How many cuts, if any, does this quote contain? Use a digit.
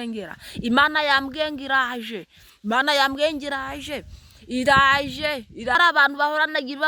1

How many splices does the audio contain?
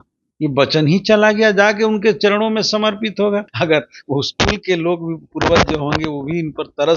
1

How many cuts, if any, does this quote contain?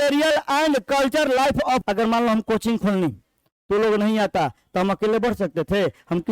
1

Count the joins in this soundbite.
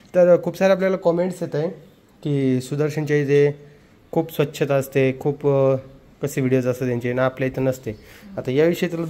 0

